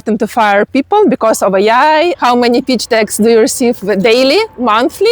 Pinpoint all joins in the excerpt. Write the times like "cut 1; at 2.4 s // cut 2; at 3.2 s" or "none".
cut 1; at 2.2 s